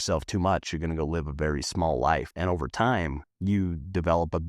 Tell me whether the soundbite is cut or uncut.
cut